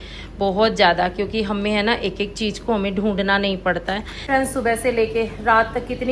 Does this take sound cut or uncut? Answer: cut